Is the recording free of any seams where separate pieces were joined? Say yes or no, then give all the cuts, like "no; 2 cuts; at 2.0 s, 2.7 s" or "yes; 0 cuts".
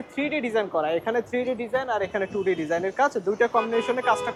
yes; 0 cuts